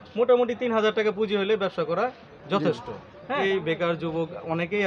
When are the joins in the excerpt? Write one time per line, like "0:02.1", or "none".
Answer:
0:03.4